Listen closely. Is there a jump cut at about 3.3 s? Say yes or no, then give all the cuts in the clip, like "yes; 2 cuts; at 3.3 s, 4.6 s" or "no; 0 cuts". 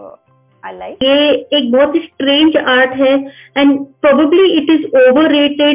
no; 1 cut; at 1.0 s